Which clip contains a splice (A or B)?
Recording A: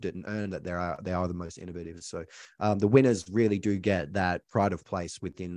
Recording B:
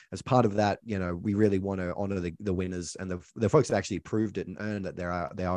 A